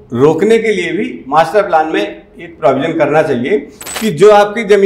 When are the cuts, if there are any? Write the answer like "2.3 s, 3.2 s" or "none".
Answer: 3.8 s